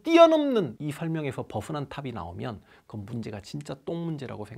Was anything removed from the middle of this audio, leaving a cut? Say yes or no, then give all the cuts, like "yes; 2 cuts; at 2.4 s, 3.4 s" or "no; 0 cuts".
no; 0 cuts